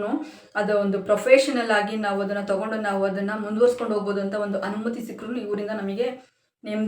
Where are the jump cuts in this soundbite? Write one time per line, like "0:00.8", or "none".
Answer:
none